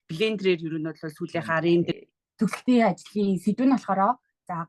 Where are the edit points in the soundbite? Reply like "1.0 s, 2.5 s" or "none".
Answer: 1.9 s